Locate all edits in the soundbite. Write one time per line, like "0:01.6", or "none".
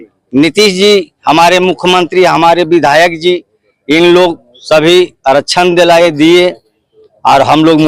none